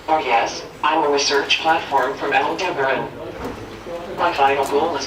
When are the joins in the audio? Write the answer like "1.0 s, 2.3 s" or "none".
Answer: none

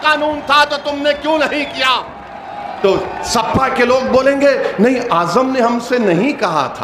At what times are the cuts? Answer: none

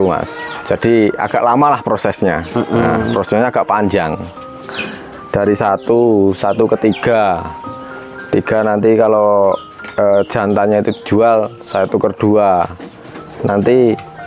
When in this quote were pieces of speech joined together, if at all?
none

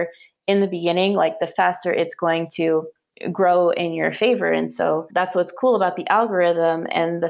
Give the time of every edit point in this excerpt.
5.1 s

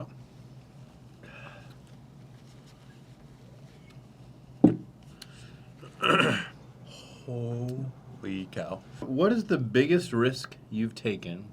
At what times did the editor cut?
9.1 s

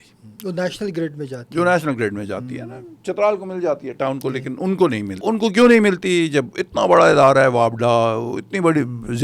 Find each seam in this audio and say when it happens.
5.1 s

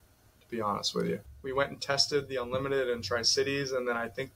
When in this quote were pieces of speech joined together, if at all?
1.2 s

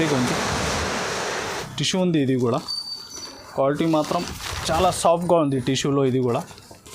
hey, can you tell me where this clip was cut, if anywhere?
1.6 s

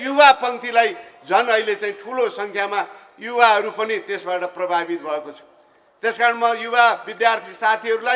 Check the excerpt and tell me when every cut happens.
none

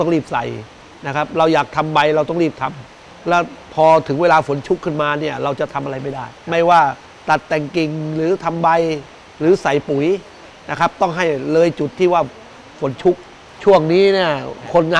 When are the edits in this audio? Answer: none

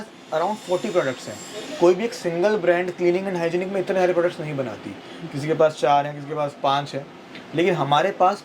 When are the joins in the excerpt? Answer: none

